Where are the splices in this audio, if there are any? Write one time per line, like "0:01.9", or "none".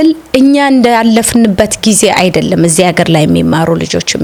none